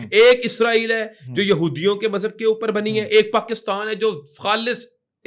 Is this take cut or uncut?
uncut